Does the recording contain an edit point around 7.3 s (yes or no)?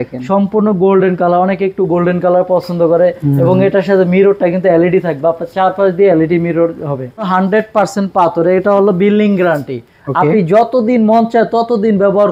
yes